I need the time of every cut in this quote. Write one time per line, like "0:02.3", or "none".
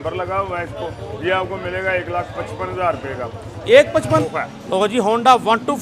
0:04.3